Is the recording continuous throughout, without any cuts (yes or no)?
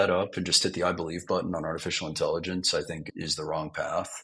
no